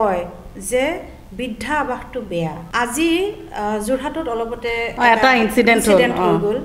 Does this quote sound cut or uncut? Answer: cut